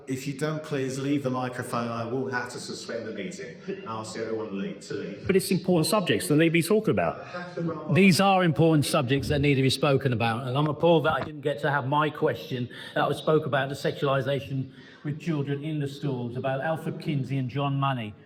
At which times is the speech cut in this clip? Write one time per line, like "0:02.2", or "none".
none